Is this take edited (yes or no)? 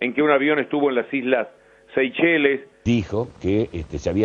yes